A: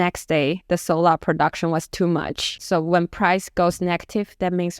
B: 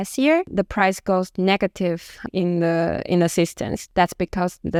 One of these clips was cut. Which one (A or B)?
A